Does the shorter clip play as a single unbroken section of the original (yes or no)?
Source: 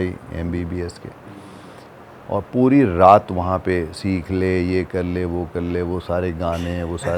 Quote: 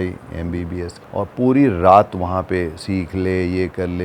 no